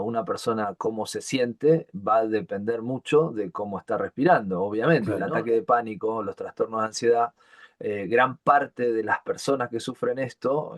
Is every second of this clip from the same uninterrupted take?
no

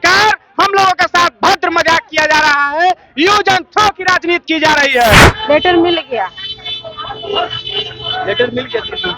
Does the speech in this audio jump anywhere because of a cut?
yes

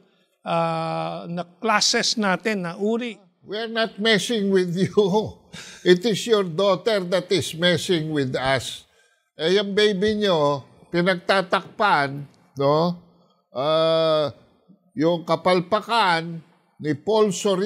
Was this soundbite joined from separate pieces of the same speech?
yes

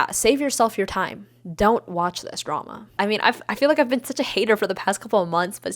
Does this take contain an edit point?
yes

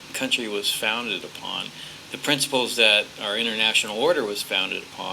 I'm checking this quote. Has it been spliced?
yes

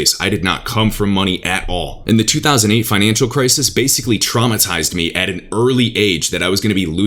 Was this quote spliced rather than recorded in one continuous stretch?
no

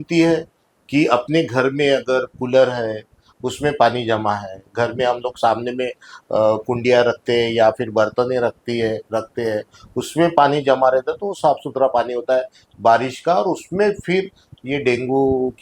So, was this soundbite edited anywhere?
no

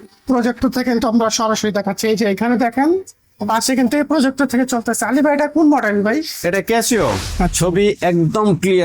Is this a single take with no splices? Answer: no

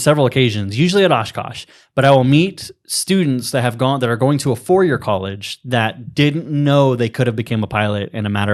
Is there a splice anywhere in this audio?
no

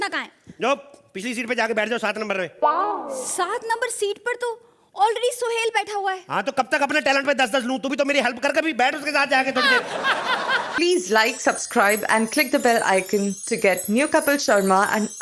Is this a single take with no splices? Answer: no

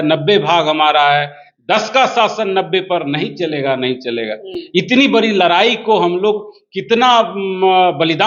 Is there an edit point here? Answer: no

